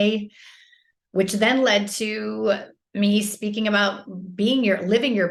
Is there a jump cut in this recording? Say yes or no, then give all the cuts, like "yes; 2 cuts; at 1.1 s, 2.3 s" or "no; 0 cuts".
no; 0 cuts